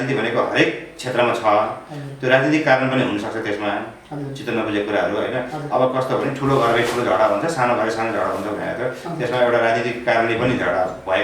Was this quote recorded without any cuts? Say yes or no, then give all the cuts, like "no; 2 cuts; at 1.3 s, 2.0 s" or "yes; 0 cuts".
yes; 0 cuts